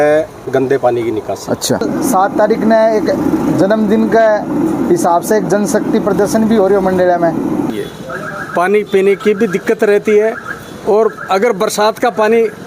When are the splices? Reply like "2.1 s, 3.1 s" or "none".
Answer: 1.8 s, 7.7 s